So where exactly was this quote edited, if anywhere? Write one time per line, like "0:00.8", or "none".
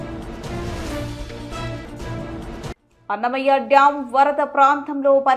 0:02.7